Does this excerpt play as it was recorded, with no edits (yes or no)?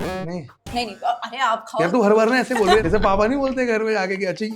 no